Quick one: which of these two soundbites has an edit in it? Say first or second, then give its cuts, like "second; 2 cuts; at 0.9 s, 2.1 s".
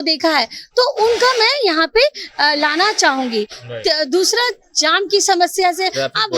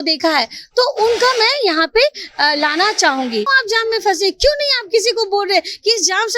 second; 1 cut; at 3.5 s